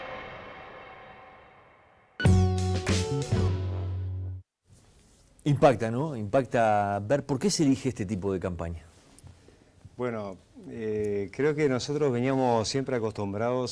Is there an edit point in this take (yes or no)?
yes